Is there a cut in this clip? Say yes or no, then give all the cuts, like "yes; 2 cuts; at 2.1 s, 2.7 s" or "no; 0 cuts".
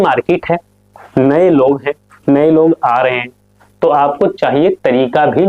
no; 0 cuts